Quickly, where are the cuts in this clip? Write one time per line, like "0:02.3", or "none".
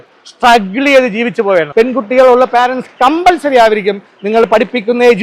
0:01.7